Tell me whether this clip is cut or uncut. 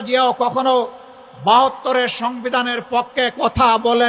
uncut